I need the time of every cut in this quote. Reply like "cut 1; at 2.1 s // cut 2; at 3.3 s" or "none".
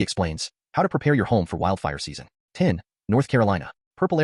cut 1; at 2.3 s